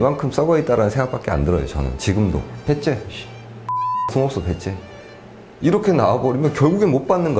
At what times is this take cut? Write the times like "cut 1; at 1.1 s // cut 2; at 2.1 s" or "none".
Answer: cut 1; at 2.5 s